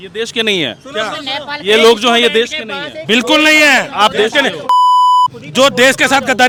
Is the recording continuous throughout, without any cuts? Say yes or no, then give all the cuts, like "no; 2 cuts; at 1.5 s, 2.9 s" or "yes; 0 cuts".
yes; 0 cuts